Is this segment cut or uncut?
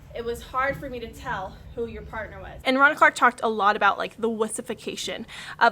cut